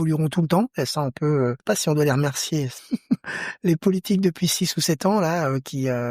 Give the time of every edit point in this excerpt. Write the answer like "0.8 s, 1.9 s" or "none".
1.6 s, 2.8 s